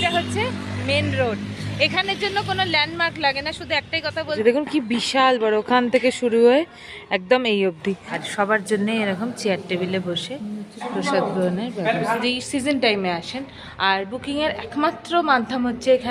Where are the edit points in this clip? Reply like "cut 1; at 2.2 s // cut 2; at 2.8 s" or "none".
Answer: cut 1; at 4.4 s // cut 2; at 8.0 s // cut 3; at 12.2 s